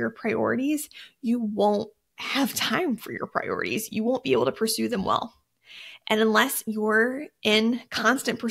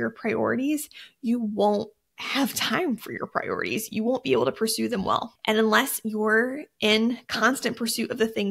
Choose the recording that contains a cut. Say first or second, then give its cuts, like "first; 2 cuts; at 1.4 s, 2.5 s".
second; 1 cut; at 5.3 s